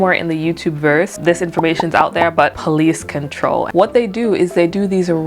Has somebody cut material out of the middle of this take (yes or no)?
yes